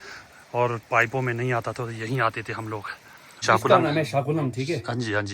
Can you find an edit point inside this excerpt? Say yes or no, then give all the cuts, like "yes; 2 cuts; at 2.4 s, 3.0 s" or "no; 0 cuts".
yes; 1 cut; at 3.4 s